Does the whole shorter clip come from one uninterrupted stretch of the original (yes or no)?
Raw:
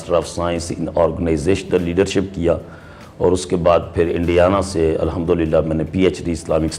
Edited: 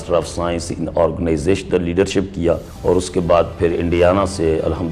no